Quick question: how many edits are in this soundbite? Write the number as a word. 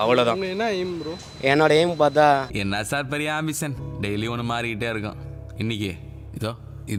zero